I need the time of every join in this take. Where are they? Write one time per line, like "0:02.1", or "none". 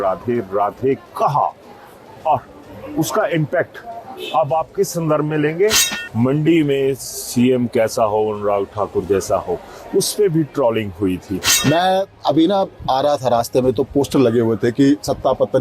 0:05.9
0:11.5